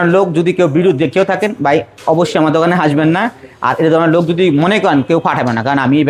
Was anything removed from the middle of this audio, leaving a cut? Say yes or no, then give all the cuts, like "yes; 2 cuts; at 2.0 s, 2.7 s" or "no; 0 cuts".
no; 0 cuts